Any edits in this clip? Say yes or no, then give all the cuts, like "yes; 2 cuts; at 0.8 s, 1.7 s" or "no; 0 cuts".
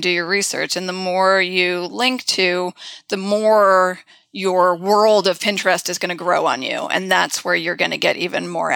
no; 0 cuts